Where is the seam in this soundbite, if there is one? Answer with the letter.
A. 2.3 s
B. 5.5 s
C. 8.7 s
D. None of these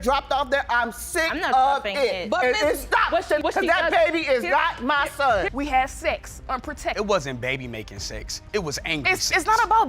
B